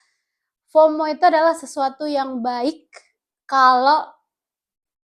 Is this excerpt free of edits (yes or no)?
yes